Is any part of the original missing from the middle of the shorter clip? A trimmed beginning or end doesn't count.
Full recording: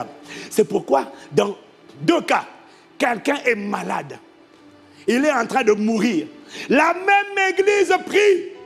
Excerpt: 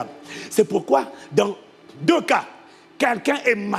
no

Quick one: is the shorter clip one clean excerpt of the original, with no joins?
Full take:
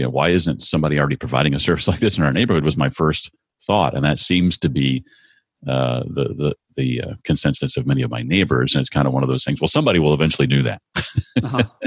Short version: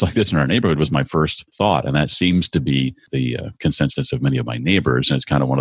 no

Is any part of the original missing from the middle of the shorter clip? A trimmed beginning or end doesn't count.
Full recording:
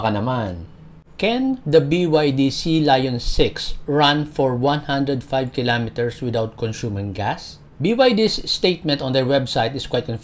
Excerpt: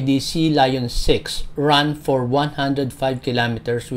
no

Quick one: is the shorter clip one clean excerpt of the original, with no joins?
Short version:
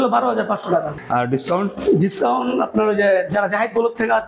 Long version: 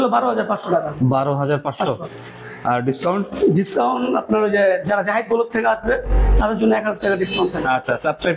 no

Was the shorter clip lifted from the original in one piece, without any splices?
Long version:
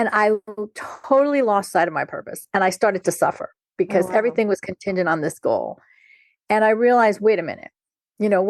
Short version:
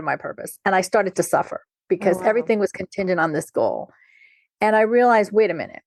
yes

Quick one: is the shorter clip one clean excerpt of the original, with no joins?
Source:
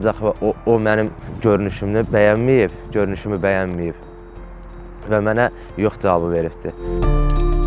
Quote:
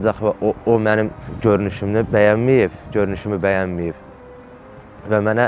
yes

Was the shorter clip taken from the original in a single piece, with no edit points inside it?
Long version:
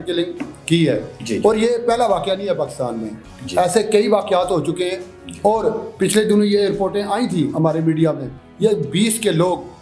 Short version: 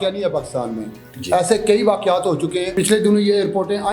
no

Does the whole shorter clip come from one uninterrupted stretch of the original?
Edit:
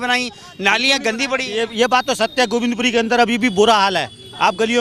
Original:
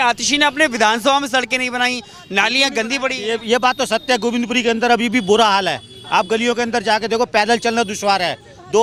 yes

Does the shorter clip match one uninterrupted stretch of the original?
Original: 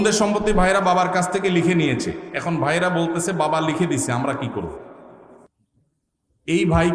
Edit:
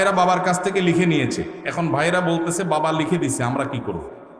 yes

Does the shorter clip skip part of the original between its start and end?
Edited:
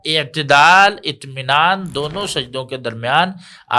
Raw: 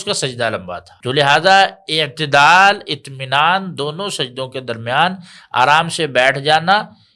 no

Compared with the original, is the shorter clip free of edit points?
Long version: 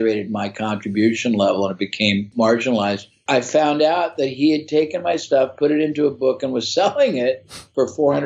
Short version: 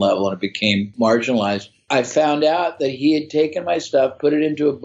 yes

